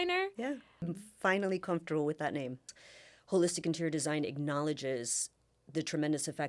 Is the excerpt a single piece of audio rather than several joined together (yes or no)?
no